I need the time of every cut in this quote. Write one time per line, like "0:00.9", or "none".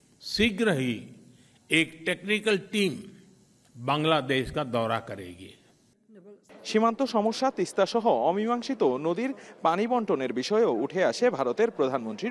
none